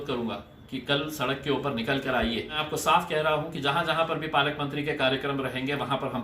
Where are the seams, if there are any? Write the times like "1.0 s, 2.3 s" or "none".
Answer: 2.6 s